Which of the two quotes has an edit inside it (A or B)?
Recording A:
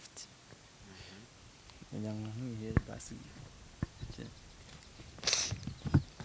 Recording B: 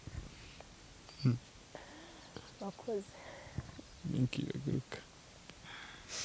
A